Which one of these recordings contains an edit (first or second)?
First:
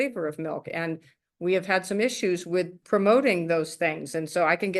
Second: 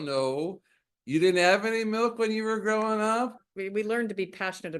second